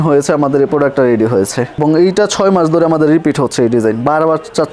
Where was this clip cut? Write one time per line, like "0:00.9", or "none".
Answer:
0:01.8